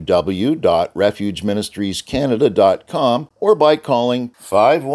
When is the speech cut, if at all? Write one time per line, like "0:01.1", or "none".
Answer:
0:03.3